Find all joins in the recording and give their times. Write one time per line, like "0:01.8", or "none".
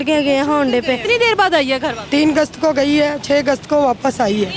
0:01.0
0:02.0